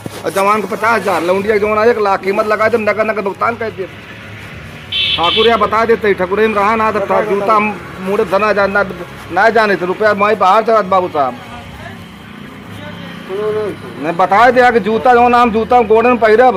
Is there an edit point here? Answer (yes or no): no